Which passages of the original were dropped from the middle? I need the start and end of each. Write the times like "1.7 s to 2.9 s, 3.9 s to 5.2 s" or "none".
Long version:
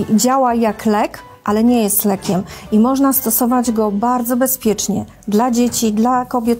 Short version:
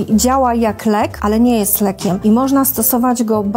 1.2 s to 1.4 s, 2.4 s to 2.7 s